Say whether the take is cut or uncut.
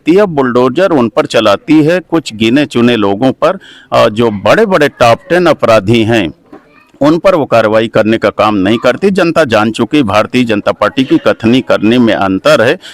uncut